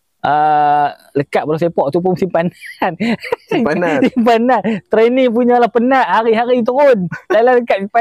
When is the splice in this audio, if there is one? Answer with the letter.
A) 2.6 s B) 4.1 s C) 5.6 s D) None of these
D